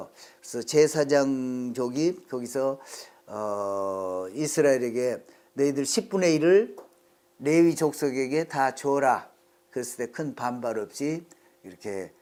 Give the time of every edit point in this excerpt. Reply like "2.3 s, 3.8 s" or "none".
none